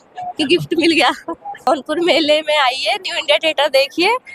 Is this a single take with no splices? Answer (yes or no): no